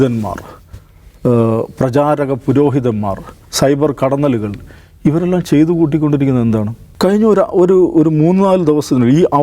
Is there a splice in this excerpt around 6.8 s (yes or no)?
yes